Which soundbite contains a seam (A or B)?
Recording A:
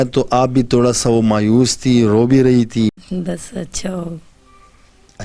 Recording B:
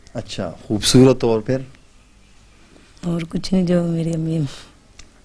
A